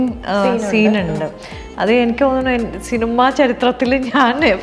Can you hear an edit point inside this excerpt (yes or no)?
no